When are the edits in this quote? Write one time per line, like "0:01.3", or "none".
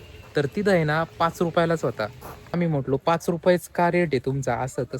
0:02.5